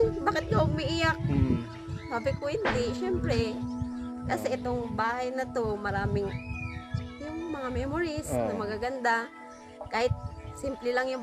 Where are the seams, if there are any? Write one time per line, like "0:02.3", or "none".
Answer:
none